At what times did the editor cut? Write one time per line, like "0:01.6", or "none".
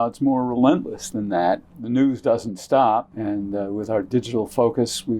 0:01.7
0:03.1